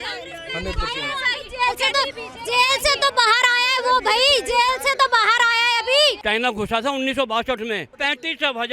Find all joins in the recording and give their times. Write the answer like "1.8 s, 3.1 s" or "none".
6.2 s, 7.9 s

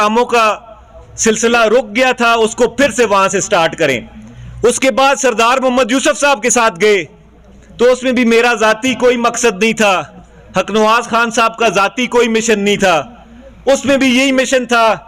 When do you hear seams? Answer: none

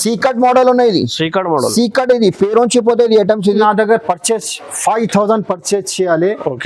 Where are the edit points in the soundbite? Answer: 3.6 s

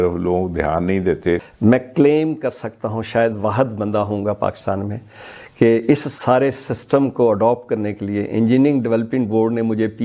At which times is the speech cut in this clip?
1.5 s

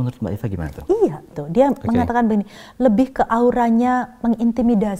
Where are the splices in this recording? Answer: 1.4 s

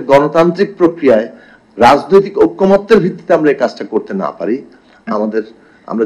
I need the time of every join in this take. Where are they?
none

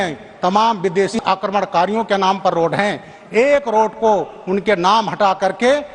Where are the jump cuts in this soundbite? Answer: 1.2 s

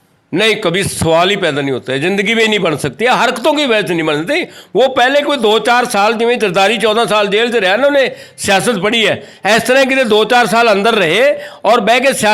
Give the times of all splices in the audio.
none

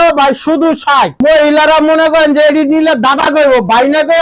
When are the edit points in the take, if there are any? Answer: 1.1 s

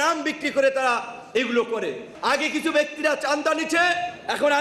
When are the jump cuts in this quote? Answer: 2.1 s

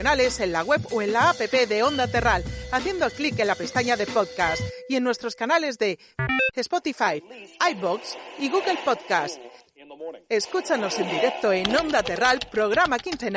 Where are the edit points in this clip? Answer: none

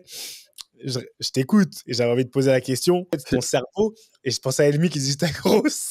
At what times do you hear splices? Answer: 3.1 s

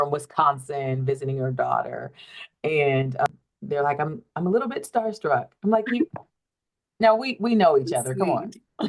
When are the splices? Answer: 3.3 s

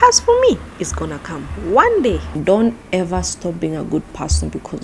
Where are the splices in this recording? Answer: 2.4 s

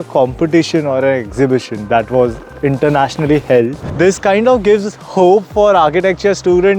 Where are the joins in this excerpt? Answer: 3.8 s

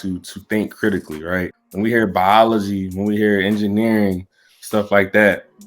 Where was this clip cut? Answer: 1.6 s

